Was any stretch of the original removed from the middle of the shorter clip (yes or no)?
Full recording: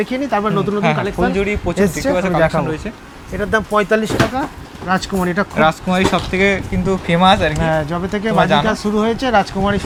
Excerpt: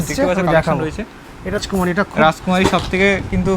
yes